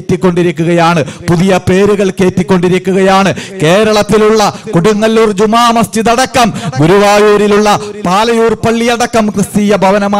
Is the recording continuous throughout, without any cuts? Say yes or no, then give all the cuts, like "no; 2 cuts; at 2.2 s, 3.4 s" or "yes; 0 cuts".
yes; 0 cuts